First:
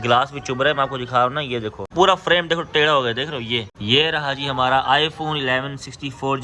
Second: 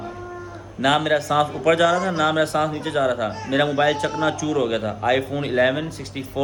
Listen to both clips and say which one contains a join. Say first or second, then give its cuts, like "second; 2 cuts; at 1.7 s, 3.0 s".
first; 2 cuts; at 1.8 s, 3.7 s